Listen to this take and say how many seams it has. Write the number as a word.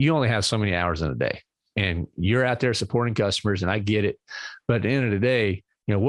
one